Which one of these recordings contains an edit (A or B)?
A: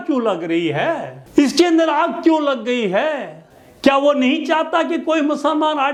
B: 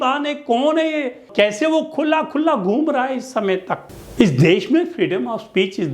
B